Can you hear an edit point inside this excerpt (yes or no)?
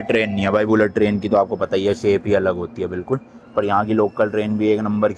no